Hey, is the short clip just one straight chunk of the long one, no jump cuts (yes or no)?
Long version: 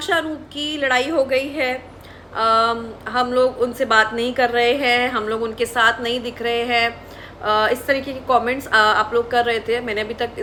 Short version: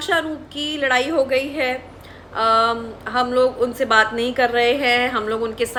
yes